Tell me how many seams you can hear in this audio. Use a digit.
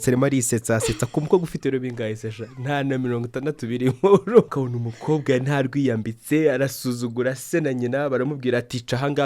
1